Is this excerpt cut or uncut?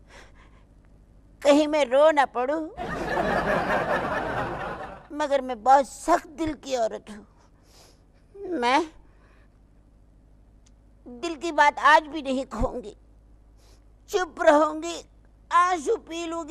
uncut